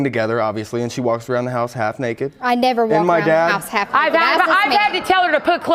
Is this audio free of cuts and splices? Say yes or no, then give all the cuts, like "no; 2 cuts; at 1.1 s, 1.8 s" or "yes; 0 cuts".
yes; 0 cuts